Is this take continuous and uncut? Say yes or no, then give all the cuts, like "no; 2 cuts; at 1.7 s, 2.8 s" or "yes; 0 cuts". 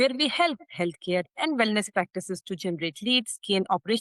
yes; 0 cuts